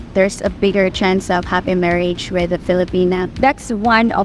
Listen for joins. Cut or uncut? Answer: cut